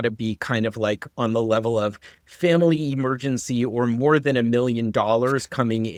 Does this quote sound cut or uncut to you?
uncut